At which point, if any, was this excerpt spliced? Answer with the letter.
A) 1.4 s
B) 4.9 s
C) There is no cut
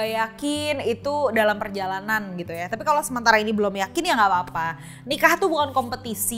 C